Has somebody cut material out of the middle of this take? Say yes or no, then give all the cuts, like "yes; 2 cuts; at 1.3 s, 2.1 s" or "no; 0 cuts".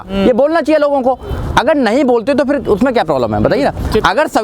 no; 0 cuts